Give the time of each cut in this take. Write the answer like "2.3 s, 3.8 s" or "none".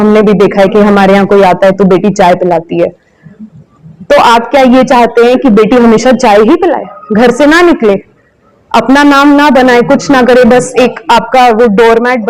none